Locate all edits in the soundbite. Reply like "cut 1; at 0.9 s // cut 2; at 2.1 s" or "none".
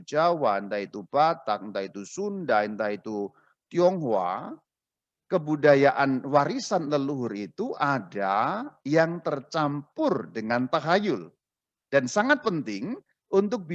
none